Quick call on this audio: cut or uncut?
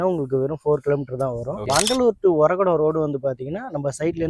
cut